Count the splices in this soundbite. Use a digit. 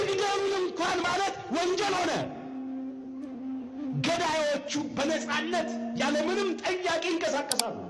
0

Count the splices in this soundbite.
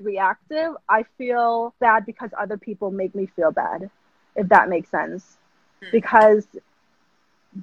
1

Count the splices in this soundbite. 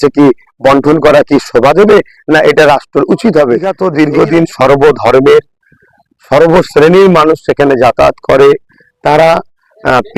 1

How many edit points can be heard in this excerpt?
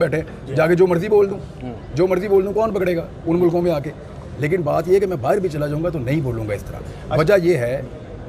0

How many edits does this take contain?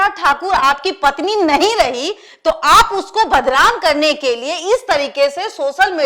0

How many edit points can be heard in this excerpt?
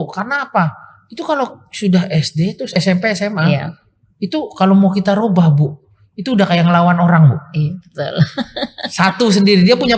1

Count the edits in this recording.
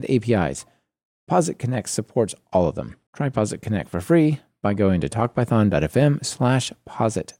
0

